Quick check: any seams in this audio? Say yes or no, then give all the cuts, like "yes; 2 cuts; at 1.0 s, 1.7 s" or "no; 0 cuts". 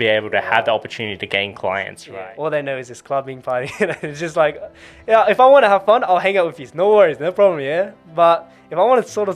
yes; 1 cut; at 2.0 s